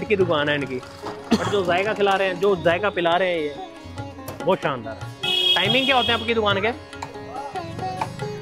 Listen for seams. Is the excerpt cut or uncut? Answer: uncut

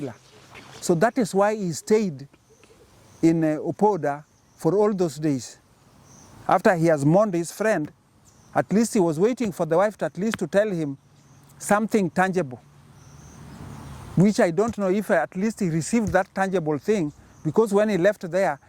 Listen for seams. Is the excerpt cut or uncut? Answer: uncut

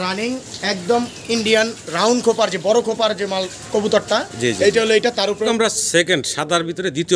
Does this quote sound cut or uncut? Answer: cut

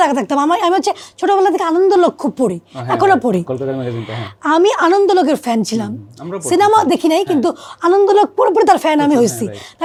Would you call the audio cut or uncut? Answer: uncut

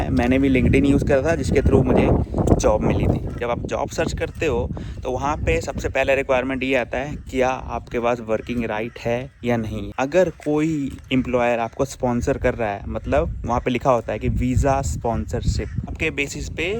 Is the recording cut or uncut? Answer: cut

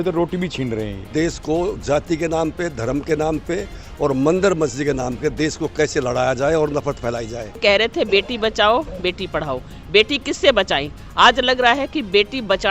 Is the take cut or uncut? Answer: cut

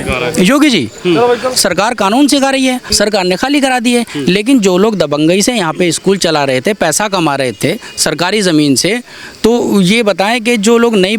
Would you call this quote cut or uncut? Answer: cut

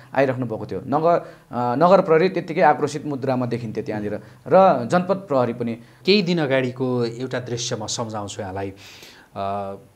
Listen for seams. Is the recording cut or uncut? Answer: cut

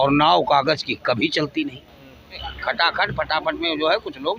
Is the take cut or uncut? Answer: cut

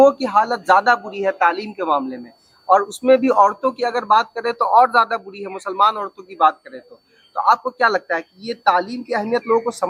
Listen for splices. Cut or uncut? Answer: uncut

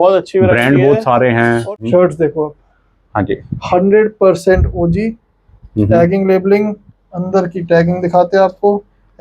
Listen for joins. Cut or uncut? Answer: cut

